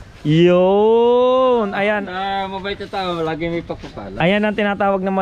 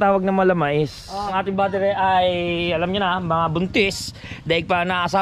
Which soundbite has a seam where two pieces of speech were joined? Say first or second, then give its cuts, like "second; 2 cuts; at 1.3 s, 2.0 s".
second; 1 cut; at 1.3 s